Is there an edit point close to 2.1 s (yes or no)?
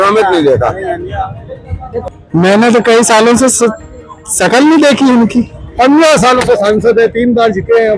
yes